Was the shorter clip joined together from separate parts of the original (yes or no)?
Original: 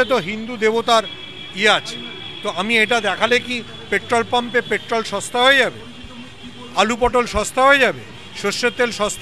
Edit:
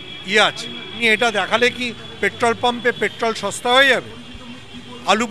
yes